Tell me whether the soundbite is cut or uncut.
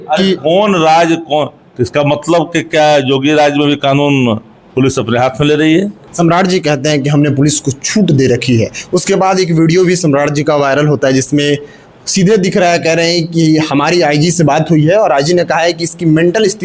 cut